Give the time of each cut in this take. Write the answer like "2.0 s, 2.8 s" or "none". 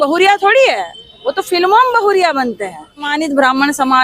3.1 s